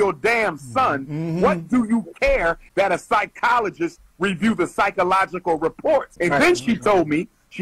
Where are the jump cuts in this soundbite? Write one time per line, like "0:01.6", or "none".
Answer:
0:02.6
0:06.1